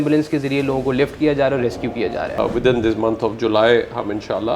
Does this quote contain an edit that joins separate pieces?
yes; 1 cut; at 2.4 s

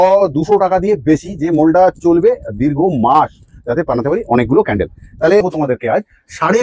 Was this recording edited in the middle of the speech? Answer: yes; 1 cut; at 5.4 s

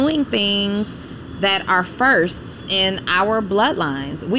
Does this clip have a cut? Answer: no; 0 cuts

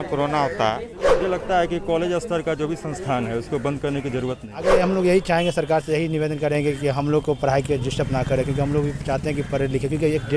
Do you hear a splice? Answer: yes; 2 cuts; at 0.9 s, 4.7 s

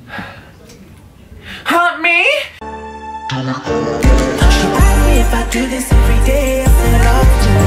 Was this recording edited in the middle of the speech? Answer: yes; 1 cut; at 2.9 s

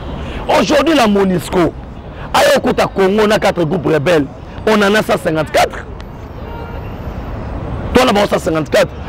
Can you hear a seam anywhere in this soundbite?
no; 0 cuts

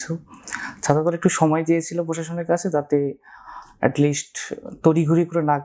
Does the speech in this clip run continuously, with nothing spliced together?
yes; 0 cuts

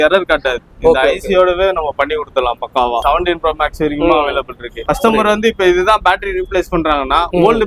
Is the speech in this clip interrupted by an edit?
yes; 2 cuts; at 3.0 s, 4.8 s

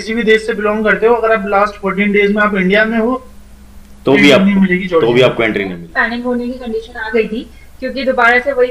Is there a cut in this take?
yes; 1 cut; at 5.8 s

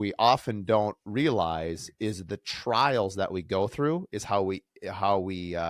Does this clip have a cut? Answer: yes; 1 cut; at 1.0 s

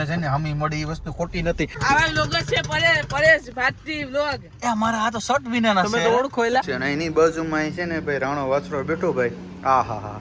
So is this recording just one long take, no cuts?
no; 2 cuts; at 1.8 s, 6.7 s

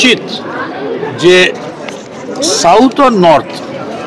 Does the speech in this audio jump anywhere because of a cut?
no; 0 cuts

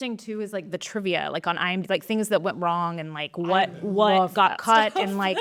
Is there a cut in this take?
no; 0 cuts

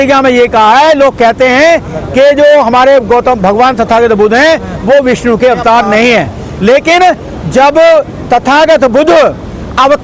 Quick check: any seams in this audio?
no; 0 cuts

